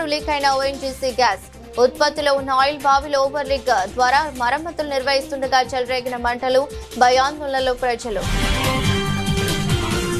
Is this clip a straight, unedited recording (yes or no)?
no